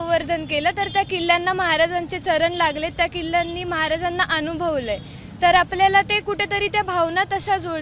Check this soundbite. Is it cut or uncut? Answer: uncut